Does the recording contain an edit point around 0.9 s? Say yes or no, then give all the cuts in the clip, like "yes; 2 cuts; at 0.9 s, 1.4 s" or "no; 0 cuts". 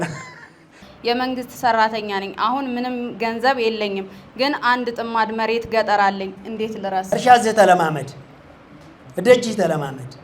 yes; 2 cuts; at 0.9 s, 7.1 s